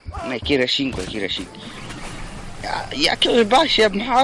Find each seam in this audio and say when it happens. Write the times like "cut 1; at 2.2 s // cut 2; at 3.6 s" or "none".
cut 1; at 1.4 s